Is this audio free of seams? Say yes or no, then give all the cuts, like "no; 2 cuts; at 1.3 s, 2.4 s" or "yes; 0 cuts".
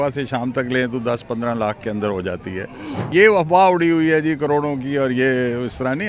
no; 1 cut; at 3.1 s